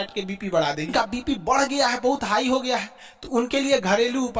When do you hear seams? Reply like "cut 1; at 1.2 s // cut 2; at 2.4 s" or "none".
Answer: cut 1; at 0.9 s